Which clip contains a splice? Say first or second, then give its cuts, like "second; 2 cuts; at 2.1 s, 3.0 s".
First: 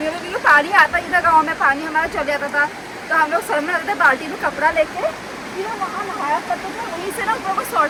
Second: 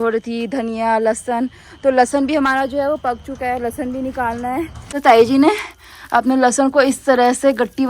second; 1 cut; at 4.9 s